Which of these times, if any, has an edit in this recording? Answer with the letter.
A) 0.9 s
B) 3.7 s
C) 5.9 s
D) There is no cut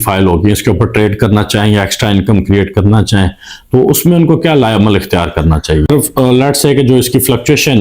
C